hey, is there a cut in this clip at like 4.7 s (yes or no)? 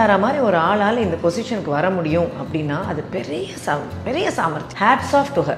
yes